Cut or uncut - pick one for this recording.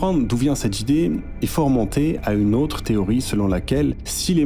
uncut